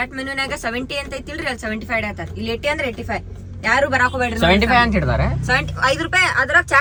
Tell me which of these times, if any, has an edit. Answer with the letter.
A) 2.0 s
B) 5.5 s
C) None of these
C